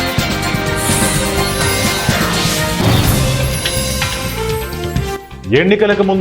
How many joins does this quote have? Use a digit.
1